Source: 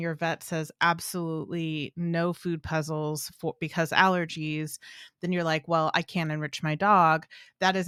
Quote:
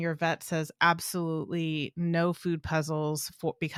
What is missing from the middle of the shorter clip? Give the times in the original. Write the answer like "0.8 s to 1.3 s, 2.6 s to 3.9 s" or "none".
none